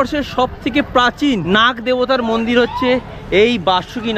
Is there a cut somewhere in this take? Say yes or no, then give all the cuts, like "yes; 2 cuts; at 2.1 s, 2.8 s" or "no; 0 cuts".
yes; 1 cut; at 1.4 s